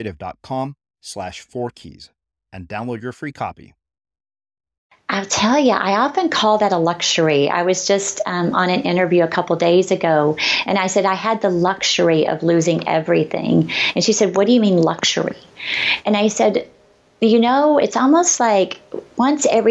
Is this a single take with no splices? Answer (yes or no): no